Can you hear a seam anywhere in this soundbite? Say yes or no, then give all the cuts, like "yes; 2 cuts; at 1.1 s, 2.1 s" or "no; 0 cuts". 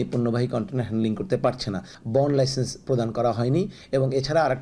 yes; 1 cut; at 1.9 s